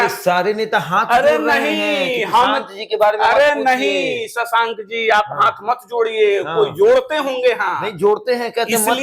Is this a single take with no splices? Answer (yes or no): yes